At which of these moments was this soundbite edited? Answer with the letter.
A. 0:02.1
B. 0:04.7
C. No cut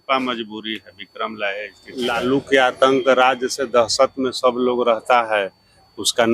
A